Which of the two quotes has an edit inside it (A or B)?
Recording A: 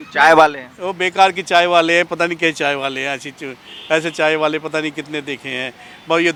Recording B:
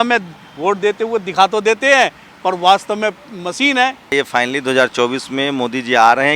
B